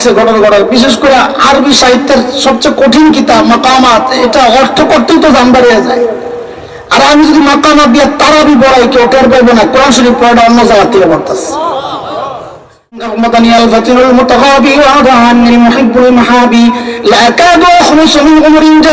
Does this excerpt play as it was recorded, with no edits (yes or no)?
no